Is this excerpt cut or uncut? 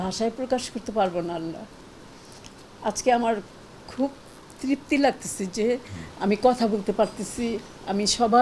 uncut